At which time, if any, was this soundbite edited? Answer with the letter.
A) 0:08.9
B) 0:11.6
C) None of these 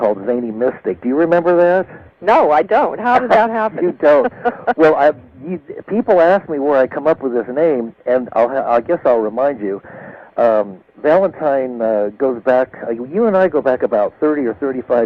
B